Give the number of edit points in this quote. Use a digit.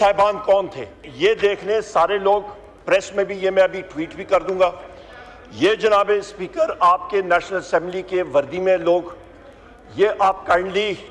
1